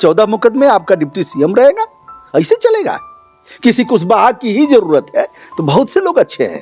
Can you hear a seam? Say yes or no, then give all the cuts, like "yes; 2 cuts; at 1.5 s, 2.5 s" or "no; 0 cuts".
no; 0 cuts